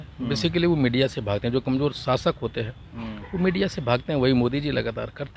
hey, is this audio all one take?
yes; 0 cuts

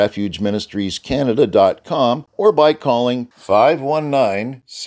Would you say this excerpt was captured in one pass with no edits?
no; 1 cut; at 2.3 s

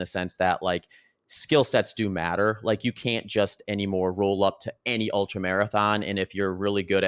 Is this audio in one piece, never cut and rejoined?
yes; 0 cuts

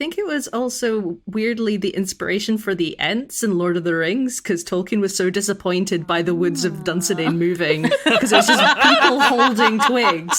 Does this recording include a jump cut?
yes; 1 cut; at 1.2 s

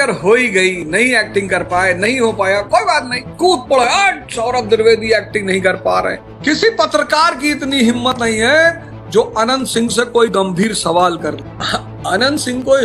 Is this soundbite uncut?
no; 3 cuts; at 3.3 s, 6.3 s, 11.4 s

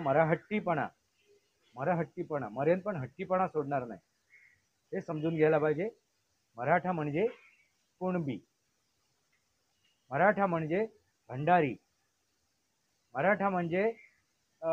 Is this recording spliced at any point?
no; 0 cuts

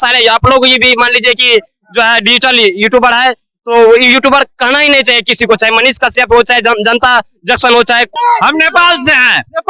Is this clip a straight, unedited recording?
no; 1 cut; at 8.1 s

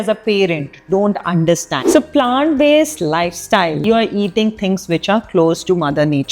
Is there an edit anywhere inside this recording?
yes; 2 cuts; at 1.7 s, 3.8 s

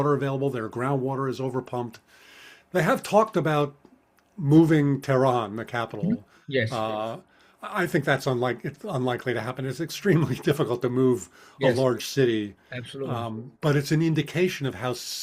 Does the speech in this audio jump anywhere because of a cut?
no; 0 cuts

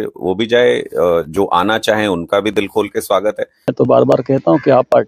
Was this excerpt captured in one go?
no; 1 cut; at 3.7 s

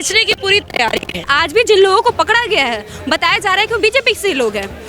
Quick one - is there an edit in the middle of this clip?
yes; 1 cut; at 1.3 s

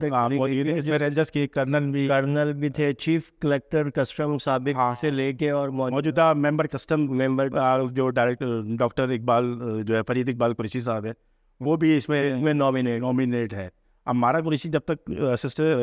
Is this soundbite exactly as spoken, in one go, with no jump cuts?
no; 1 cut; at 13.8 s

